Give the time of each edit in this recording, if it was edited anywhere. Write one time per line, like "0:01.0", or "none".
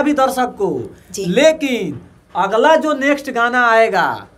none